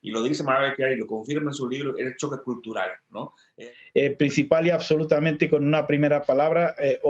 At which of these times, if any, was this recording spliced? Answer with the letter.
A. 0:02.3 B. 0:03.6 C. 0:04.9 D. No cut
B